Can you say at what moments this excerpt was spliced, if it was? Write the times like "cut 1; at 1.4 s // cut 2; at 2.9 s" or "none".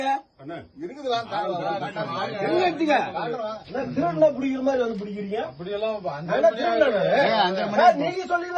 cut 1; at 3.6 s

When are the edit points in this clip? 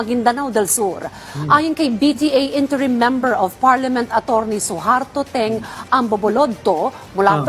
cut 1; at 1.2 s

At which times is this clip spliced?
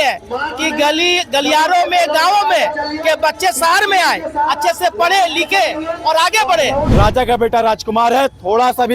cut 1; at 6.9 s

